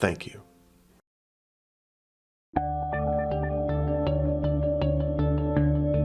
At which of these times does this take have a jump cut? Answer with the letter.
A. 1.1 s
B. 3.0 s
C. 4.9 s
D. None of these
D